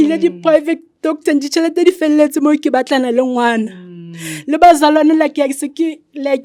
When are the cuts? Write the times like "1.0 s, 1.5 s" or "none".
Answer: none